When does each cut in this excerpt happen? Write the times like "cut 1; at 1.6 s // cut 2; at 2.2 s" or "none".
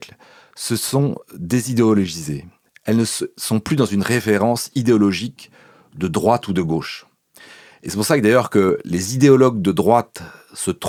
none